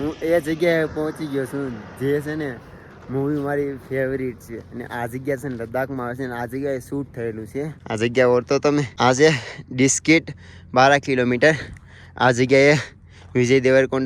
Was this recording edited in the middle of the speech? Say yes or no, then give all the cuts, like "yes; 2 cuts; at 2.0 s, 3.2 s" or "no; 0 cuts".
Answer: yes; 2 cuts; at 7.8 s, 8.9 s